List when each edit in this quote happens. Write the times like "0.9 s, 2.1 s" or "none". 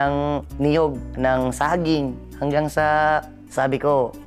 1.1 s, 2.2 s